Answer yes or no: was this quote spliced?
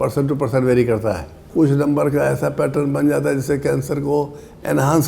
yes